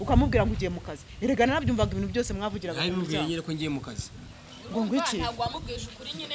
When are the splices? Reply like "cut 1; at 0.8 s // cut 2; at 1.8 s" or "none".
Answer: none